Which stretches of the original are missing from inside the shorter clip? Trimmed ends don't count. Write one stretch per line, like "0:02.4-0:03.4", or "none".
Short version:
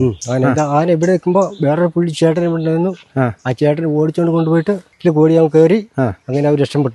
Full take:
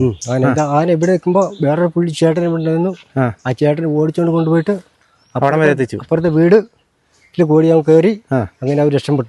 0:04.9-0:07.2